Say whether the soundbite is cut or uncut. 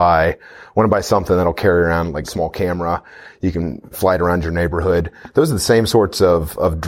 cut